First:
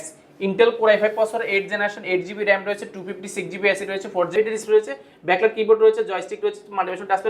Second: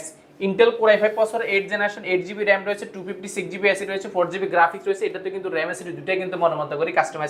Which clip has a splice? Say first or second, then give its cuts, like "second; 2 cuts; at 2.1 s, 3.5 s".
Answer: first; 1 cut; at 4.3 s